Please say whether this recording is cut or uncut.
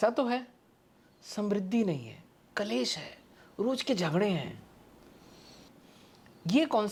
uncut